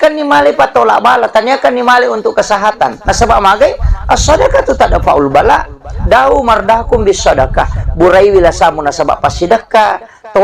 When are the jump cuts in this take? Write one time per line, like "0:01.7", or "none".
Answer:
none